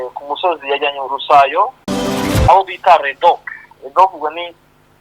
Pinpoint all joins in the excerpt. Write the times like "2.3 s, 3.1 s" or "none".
2.4 s